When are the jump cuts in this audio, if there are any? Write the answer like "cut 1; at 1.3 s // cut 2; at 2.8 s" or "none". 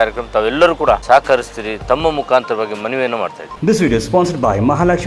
cut 1; at 1.0 s // cut 2; at 3.5 s